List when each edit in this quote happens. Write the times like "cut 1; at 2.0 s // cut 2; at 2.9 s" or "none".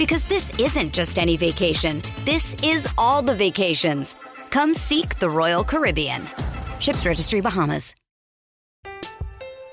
cut 1; at 8.2 s